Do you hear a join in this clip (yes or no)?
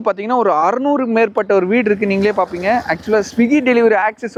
no